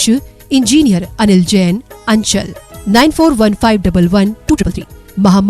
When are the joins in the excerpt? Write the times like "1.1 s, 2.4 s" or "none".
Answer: 4.5 s